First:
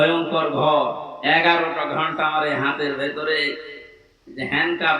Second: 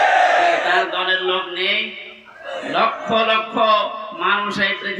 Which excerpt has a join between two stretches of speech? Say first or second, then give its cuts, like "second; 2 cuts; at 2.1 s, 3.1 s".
first; 1 cut; at 1.1 s